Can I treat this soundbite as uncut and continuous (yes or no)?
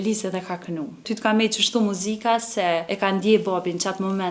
no